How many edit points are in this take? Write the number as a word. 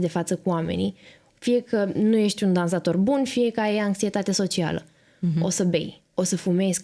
zero